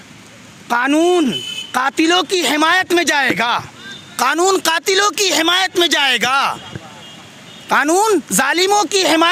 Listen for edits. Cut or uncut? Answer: uncut